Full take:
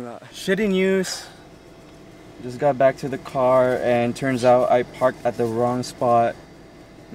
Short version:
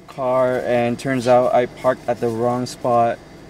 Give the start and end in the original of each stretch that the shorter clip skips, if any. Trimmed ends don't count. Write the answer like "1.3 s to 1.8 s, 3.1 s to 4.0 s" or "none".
none